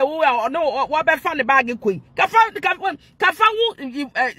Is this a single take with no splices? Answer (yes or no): yes